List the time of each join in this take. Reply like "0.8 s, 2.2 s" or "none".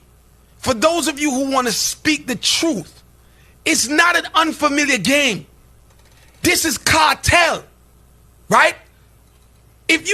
none